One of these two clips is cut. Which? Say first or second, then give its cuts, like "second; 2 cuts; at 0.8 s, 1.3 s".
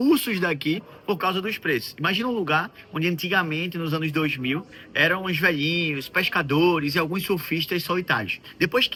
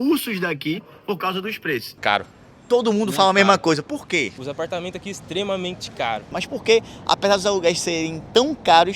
second; 3 cuts; at 1.9 s, 4.4 s, 6.4 s